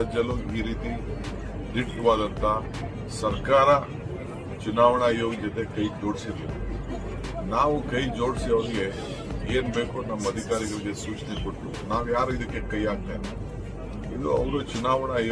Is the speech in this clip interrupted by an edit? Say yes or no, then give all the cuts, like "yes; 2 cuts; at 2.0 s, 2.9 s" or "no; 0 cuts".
no; 0 cuts